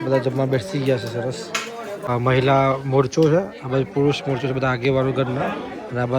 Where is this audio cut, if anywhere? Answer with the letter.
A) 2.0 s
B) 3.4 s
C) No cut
A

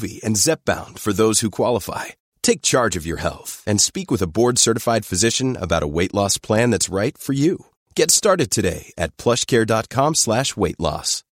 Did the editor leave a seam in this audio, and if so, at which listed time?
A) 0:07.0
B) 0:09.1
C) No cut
C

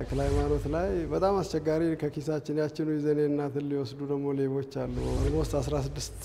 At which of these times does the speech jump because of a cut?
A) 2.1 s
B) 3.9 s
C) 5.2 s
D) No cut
C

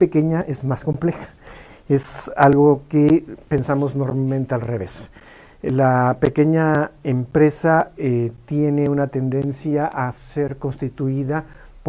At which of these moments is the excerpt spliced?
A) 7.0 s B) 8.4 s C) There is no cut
A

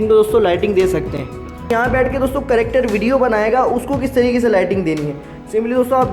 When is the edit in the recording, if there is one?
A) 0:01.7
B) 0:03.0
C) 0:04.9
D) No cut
A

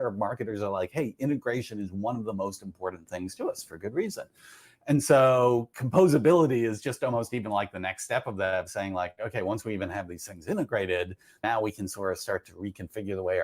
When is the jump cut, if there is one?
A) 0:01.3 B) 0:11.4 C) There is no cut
B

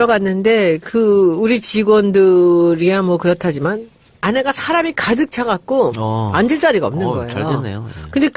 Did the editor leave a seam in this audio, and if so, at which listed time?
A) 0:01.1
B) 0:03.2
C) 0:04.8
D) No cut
D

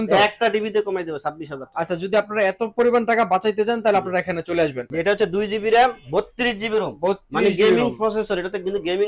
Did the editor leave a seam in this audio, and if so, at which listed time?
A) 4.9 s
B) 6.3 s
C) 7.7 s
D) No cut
A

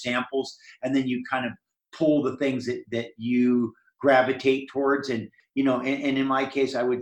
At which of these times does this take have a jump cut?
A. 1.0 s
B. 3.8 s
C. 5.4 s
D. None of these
C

